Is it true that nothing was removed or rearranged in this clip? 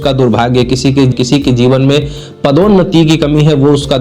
no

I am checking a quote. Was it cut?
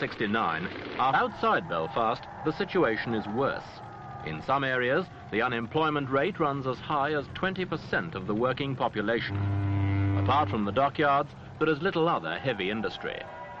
no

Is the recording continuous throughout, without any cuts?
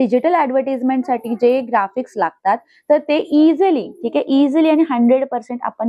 yes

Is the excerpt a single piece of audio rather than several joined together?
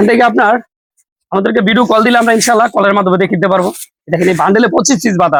yes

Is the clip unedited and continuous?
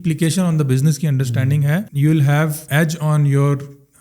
no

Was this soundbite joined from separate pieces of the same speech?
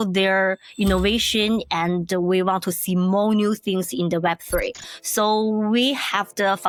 no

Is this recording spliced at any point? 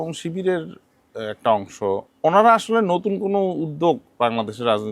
yes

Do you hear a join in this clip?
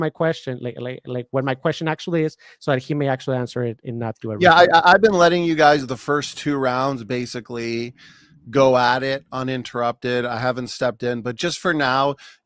no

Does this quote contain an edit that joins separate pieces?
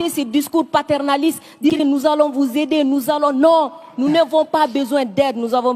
yes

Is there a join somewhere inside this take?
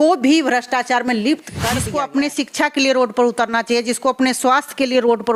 yes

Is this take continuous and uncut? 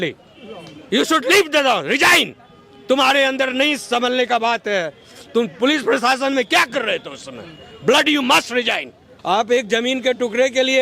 no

